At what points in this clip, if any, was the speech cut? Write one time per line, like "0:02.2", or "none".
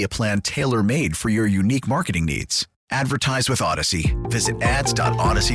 none